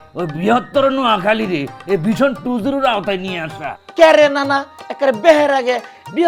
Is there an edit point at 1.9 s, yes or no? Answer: no